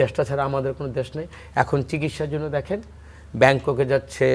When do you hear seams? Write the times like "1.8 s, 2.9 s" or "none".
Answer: none